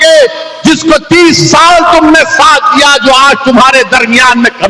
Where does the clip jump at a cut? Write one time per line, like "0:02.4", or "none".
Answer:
none